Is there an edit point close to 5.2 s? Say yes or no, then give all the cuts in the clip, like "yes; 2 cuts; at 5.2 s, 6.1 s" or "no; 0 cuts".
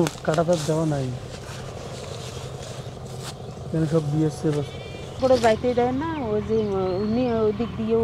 yes; 1 cut; at 5.2 s